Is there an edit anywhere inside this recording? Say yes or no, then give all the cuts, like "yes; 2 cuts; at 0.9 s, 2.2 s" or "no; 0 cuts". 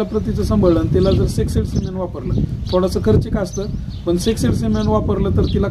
no; 0 cuts